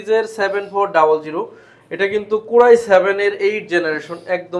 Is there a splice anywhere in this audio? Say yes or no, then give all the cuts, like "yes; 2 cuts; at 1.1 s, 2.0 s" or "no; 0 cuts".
no; 0 cuts